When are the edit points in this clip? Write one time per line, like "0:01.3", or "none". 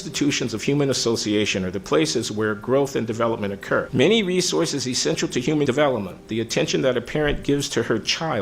0:03.9
0:05.6